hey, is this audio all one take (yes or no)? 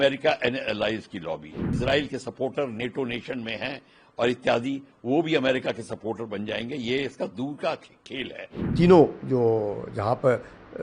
no